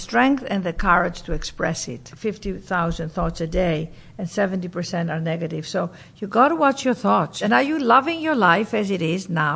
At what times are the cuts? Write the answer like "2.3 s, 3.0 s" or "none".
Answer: 2.1 s, 7.4 s